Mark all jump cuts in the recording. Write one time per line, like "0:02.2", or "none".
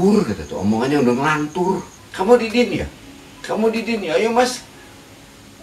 0:02.0